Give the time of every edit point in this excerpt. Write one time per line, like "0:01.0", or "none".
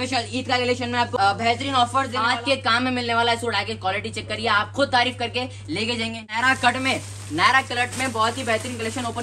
0:01.1
0:02.3
0:06.3